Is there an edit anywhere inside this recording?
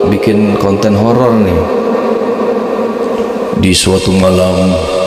no; 0 cuts

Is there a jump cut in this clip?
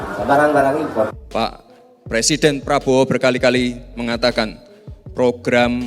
yes; 1 cut; at 1.1 s

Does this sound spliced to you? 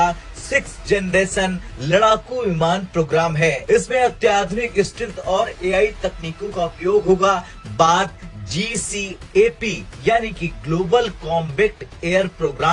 no; 0 cuts

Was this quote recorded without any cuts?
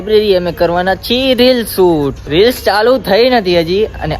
no; 1 cut; at 2.2 s

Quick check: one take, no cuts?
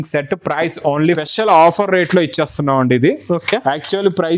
no; 1 cut; at 1.2 s

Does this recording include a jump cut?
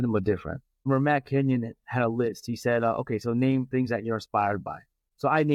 no; 0 cuts

